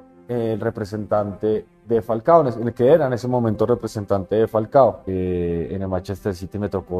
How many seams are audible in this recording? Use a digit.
1